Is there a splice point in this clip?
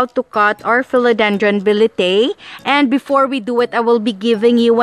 no; 0 cuts

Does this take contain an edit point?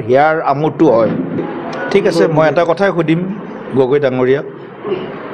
yes; 1 cut; at 1.4 s

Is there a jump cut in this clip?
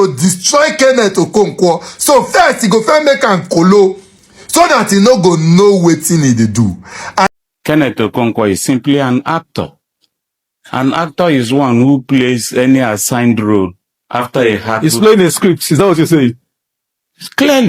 yes; 1 cut; at 7.3 s

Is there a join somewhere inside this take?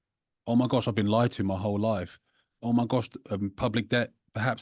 no; 0 cuts

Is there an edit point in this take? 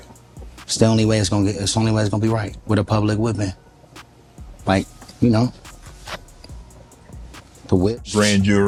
no; 0 cuts

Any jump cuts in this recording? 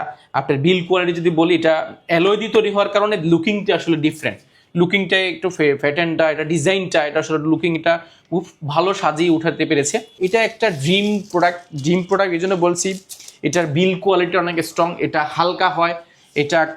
yes; 1 cut; at 10.1 s

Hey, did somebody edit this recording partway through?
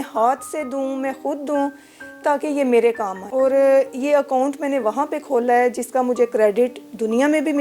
yes; 1 cut; at 3.1 s

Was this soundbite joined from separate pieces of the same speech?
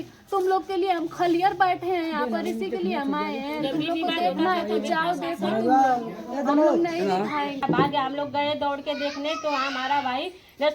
yes; 1 cut; at 7.6 s

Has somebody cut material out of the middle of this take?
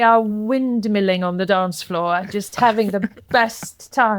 no; 0 cuts

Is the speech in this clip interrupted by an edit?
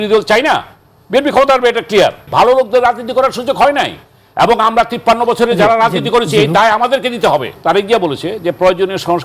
yes; 2 cuts; at 2.3 s, 7.5 s

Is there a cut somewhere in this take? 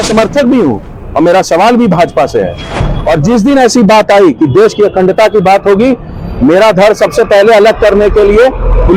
no; 0 cuts

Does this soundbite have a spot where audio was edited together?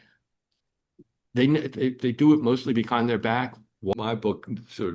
yes; 1 cut; at 3.9 s

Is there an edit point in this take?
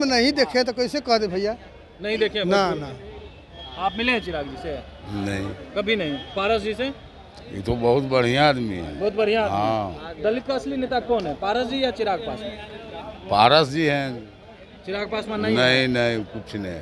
no; 0 cuts

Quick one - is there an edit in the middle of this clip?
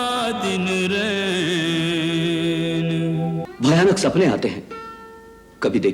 yes; 1 cut; at 3.4 s

